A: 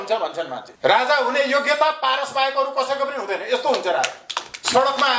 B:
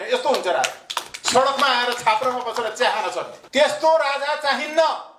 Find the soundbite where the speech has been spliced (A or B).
B